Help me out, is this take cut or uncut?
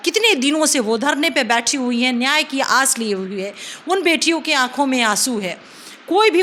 uncut